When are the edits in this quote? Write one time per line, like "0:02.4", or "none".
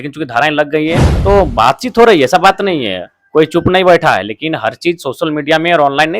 0:01.1